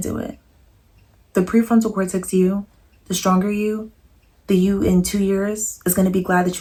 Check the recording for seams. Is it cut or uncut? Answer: uncut